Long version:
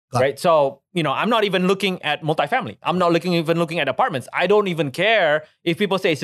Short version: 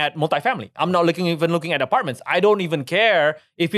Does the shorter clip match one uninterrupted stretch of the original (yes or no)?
yes